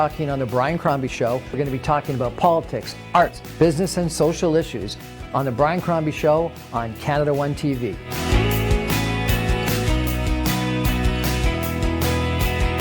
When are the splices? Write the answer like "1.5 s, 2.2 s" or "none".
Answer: 3.4 s